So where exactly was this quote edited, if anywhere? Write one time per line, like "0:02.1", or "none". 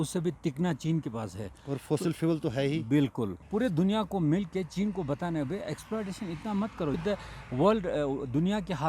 0:03.4